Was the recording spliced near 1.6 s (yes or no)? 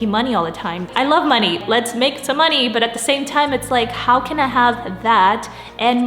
yes